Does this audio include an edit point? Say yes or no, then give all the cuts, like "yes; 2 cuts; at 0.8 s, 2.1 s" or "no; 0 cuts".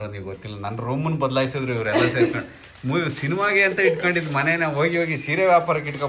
no; 0 cuts